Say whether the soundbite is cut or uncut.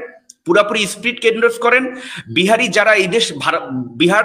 uncut